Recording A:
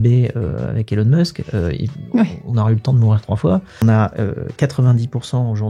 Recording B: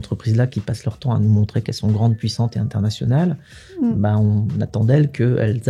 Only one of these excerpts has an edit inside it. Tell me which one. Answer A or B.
A